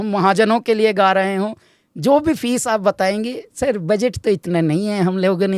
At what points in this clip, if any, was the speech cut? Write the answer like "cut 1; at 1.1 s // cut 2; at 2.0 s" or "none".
none